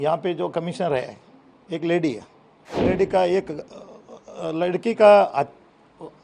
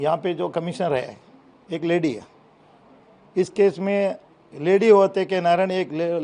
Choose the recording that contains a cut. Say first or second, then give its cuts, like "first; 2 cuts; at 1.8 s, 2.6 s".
first; 1 cut; at 2.8 s